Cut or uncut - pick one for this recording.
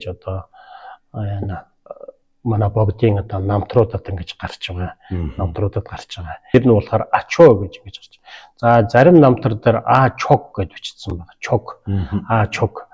cut